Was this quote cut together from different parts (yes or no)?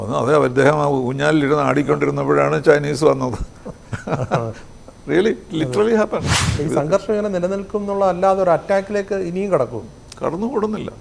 yes